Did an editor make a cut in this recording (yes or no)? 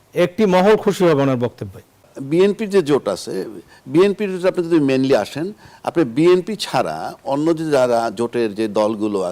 yes